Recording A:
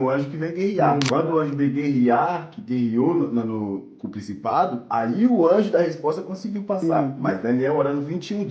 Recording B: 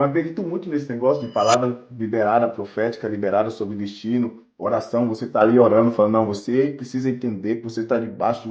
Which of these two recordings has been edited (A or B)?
A